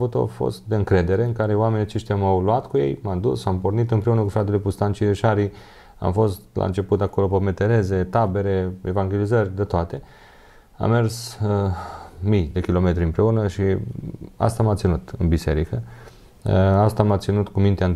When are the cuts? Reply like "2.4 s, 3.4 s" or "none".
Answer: none